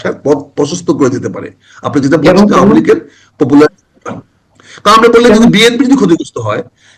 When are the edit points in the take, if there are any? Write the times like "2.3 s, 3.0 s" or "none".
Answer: none